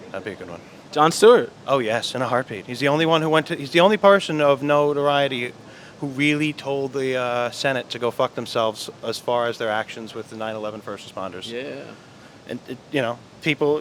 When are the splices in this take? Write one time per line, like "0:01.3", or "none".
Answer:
none